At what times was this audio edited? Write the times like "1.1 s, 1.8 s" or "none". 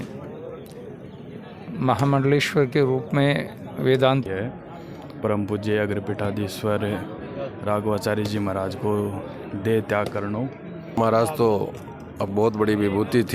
4.3 s, 11.0 s